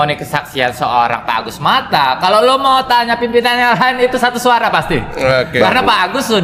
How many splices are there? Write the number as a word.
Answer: zero